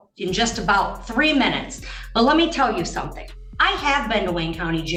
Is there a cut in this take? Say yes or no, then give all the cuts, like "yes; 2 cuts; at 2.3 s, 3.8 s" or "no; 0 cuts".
no; 0 cuts